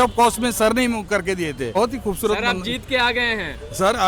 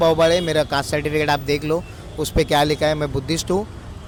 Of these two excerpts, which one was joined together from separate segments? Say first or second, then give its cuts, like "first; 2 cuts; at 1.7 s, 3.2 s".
first; 1 cut; at 1.8 s